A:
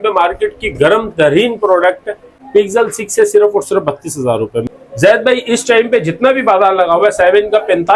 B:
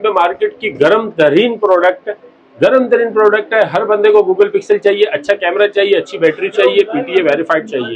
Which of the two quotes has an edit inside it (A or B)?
A